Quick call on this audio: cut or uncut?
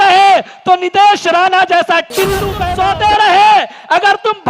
cut